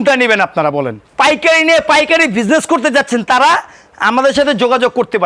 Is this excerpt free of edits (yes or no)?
no